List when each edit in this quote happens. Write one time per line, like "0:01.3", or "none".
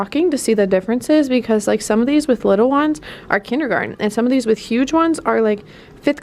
none